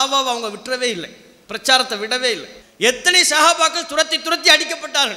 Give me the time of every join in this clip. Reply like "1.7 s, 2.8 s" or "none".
2.5 s